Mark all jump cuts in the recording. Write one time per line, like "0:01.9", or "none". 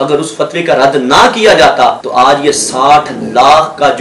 none